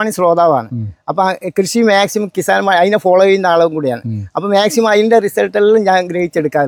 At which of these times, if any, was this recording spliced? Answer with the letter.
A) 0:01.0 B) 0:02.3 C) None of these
C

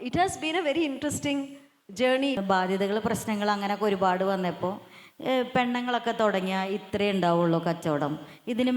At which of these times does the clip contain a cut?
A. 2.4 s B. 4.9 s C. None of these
A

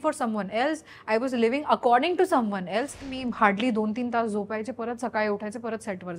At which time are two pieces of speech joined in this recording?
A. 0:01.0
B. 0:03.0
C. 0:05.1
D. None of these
B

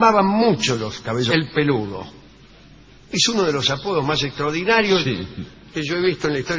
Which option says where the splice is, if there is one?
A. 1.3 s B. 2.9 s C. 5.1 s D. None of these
D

